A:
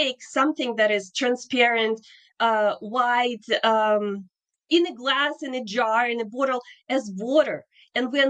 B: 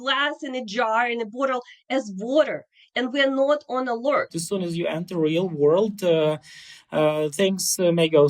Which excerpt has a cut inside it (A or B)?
B